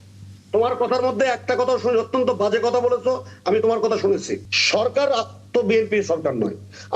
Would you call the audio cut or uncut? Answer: cut